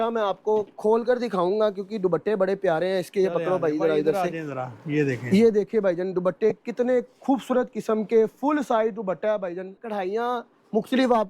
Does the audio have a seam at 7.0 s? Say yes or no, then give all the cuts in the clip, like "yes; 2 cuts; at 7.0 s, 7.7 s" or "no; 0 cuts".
no; 1 cut; at 9.9 s